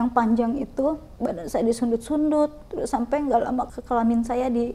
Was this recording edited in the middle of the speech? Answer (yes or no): yes